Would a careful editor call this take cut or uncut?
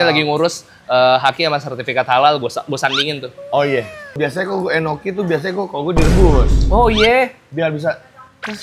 cut